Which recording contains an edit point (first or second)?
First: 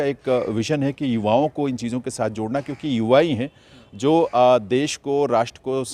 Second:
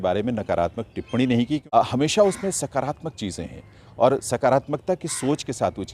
second